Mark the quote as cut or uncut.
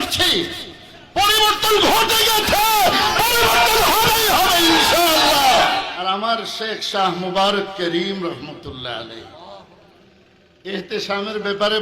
cut